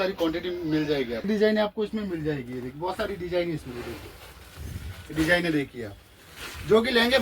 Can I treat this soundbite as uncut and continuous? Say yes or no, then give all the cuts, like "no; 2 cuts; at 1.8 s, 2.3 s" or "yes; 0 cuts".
no; 1 cut; at 1.3 s